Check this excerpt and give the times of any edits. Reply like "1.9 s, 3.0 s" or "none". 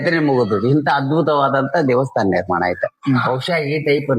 none